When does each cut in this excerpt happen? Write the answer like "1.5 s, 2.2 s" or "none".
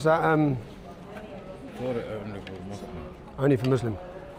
none